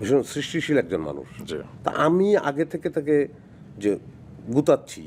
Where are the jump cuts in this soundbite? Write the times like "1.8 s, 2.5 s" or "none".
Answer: none